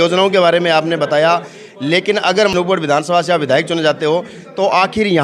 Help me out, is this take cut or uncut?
uncut